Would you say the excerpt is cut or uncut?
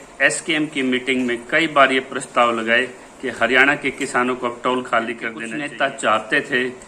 cut